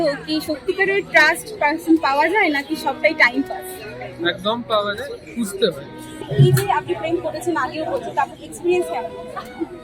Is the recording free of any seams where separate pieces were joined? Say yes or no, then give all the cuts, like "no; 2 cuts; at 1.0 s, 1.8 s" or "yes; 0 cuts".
no; 1 cut; at 6.2 s